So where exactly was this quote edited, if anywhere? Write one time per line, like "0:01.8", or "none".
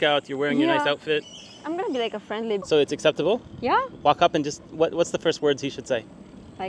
0:02.6